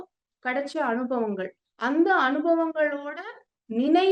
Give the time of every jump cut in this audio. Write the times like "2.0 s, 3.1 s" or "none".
none

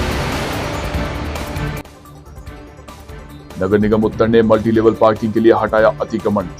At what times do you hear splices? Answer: 2.0 s

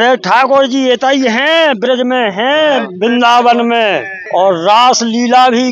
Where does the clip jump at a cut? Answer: none

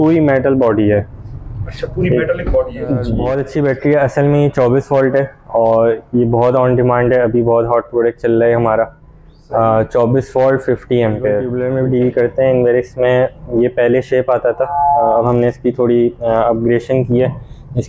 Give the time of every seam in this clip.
3.2 s, 11.5 s

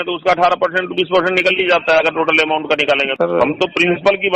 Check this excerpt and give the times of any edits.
3.1 s

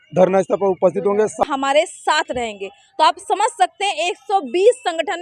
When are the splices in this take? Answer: 1.4 s

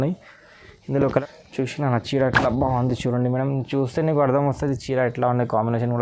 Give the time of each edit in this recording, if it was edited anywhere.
1.2 s

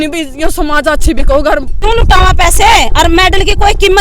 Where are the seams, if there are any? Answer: 1.7 s

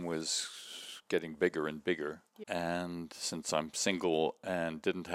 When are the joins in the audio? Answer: none

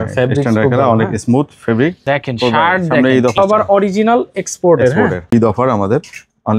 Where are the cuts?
2.0 s, 3.4 s, 5.2 s

